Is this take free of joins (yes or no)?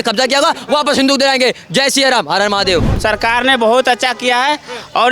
no